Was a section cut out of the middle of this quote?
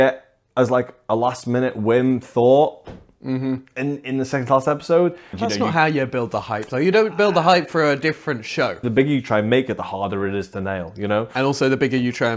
yes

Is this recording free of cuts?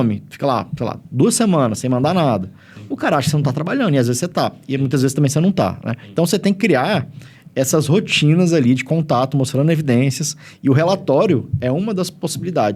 yes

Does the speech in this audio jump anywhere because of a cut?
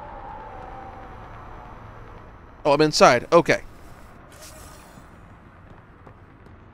no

